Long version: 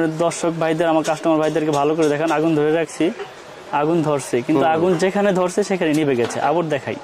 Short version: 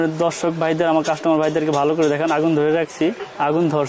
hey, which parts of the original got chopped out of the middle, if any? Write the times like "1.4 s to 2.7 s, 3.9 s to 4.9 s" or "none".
2.9 s to 3.3 s